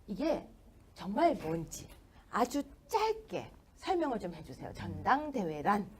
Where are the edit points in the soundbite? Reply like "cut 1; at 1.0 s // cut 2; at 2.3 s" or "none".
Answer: cut 1; at 3.2 s